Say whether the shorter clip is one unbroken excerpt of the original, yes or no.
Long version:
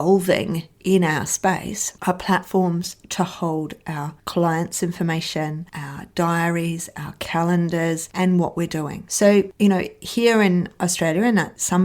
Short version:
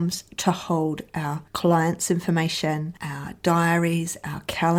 yes